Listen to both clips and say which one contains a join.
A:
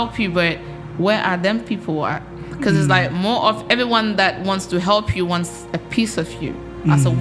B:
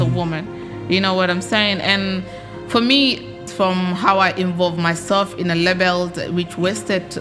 B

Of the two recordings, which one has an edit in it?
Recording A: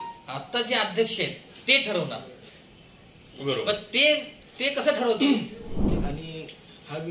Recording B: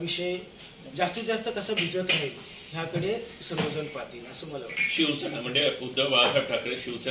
A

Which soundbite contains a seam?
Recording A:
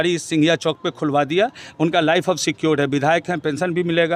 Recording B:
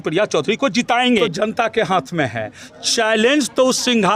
B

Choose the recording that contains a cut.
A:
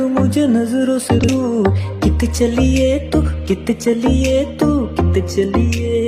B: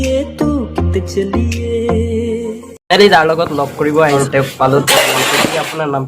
B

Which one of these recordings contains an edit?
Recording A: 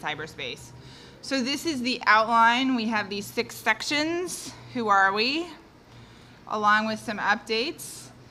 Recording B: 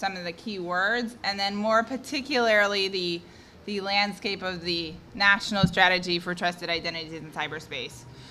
B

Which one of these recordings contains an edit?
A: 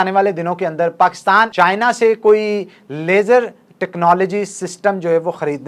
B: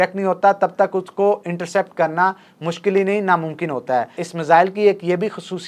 B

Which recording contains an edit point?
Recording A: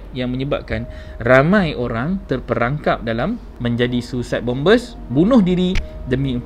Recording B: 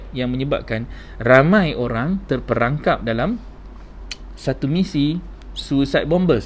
A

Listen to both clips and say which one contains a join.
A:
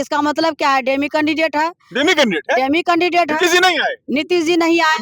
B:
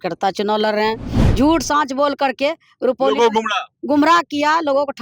B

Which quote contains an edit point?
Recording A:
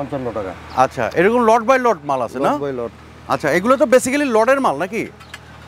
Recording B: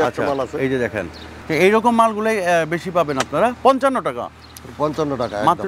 B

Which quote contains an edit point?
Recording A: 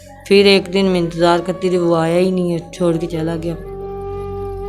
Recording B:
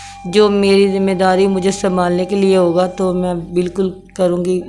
A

